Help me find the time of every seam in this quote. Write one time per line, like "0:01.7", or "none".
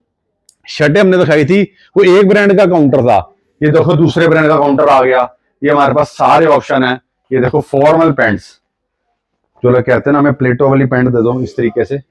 none

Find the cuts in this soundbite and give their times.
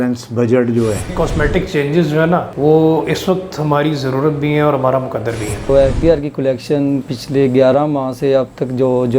0:01.1
0:05.7

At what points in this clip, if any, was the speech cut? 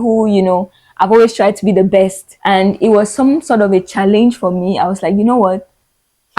0:02.3

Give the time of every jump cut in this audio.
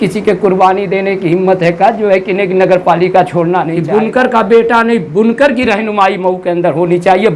0:03.8

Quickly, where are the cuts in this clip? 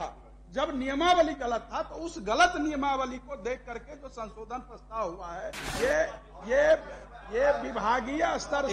0:05.6

